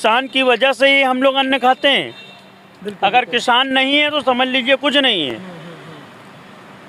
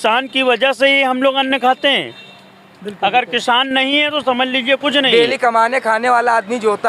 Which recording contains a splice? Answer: second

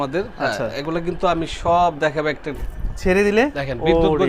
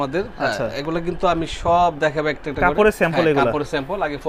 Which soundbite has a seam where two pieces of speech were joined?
first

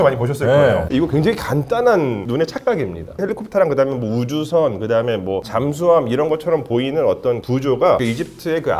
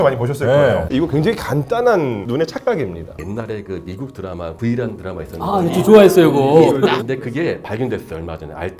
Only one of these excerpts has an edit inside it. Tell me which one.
second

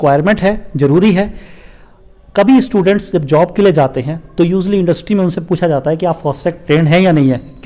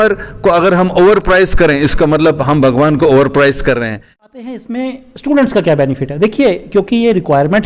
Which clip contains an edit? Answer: second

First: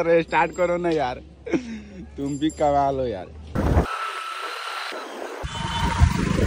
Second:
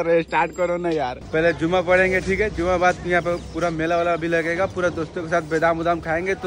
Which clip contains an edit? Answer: second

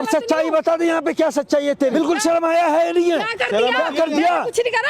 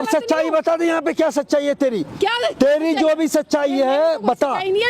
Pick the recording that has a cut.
first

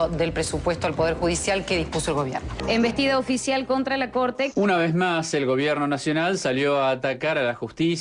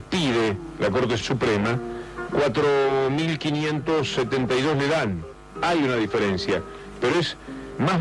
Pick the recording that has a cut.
first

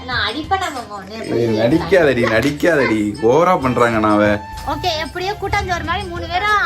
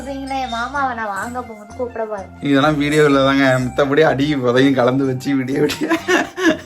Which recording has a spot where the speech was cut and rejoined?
first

